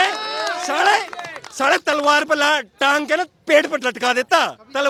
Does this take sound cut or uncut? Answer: uncut